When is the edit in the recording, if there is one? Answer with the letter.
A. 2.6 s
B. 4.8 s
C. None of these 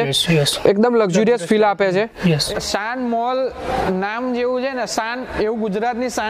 A